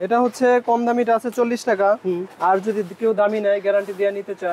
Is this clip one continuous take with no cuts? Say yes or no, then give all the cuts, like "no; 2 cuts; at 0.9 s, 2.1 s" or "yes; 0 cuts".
yes; 0 cuts